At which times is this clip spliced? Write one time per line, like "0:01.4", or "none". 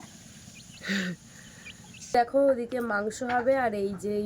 0:01.9